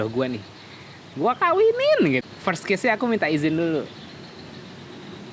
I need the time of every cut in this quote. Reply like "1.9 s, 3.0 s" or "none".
2.2 s

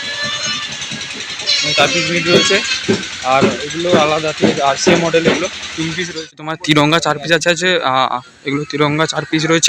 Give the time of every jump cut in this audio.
6.5 s

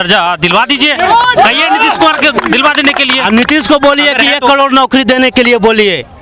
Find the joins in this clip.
none

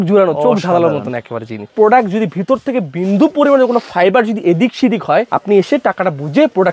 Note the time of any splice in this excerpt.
1.7 s, 5.3 s

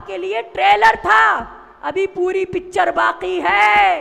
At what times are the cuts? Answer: none

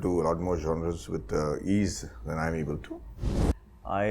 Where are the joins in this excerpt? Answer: 3.2 s

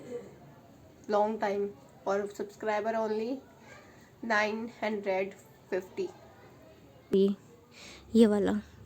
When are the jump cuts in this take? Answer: 7.1 s

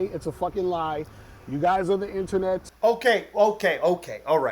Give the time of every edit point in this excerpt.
2.7 s

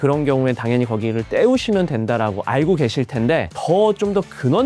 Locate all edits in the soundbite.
3.5 s

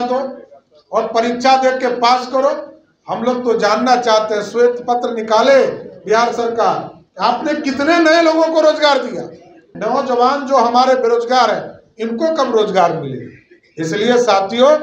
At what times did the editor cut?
9.7 s

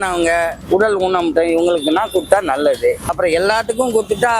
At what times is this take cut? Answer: 3.1 s

